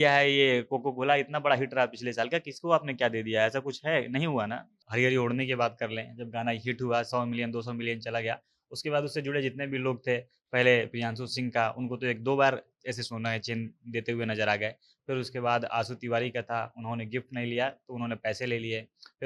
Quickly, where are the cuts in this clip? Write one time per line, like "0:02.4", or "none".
0:04.7